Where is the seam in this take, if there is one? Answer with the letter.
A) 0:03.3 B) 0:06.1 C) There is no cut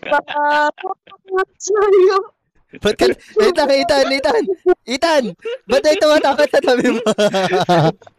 C